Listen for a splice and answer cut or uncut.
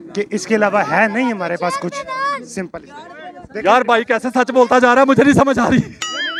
uncut